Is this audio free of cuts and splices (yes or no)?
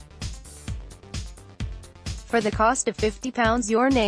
no